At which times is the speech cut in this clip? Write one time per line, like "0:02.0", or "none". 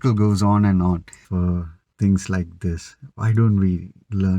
0:01.2